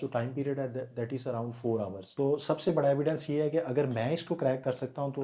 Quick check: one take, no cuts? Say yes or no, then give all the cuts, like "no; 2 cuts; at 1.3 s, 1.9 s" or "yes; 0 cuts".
no; 1 cut; at 2.0 s